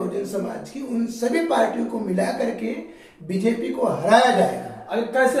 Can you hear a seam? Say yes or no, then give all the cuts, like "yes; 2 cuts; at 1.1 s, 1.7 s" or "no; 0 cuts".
no; 0 cuts